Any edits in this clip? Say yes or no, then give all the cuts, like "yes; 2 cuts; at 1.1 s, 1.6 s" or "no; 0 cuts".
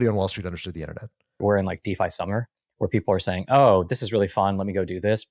yes; 1 cut; at 1.4 s